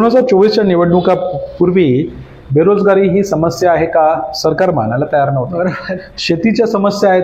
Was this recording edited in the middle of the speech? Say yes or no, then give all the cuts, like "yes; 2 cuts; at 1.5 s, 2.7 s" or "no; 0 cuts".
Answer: no; 0 cuts